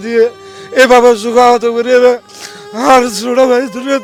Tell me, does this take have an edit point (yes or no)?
no